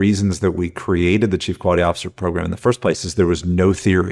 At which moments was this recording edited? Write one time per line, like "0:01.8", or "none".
none